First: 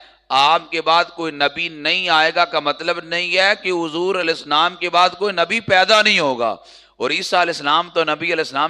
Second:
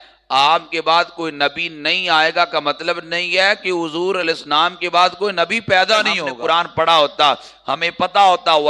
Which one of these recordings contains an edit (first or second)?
second